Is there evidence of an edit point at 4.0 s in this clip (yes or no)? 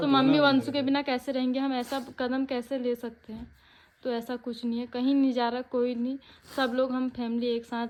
no